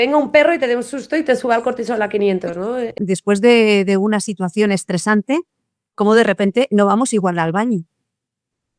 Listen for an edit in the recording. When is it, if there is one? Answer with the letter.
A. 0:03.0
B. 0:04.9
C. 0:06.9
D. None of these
A